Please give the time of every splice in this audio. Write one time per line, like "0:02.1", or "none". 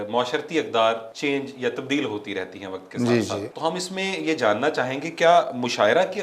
0:01.1
0:03.5